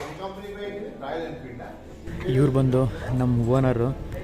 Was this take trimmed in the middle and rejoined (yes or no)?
yes